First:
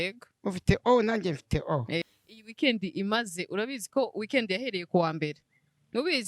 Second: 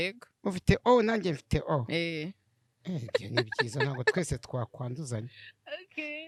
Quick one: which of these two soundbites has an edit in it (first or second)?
first